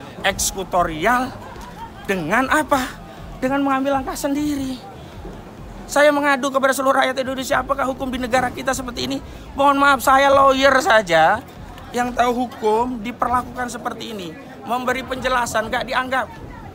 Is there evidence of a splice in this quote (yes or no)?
no